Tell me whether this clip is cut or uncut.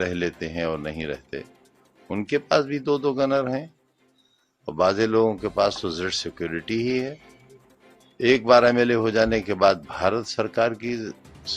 uncut